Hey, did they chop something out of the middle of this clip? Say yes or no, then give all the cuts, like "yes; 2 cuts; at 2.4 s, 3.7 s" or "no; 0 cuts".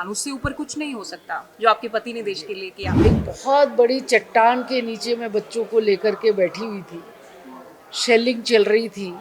yes; 1 cut; at 3.0 s